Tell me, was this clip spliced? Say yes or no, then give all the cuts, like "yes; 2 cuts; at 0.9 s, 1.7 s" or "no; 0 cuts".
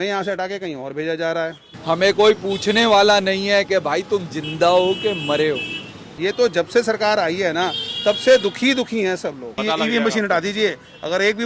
yes; 3 cuts; at 1.7 s, 6.0 s, 9.6 s